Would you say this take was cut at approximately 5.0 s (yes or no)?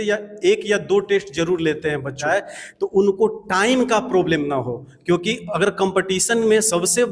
no